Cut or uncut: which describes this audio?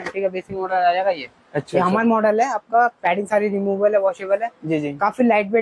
uncut